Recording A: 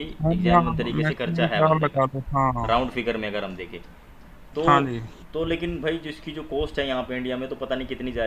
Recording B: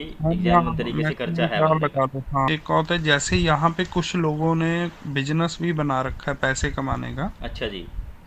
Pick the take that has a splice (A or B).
B